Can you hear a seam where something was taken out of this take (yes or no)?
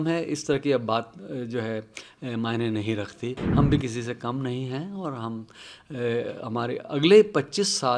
yes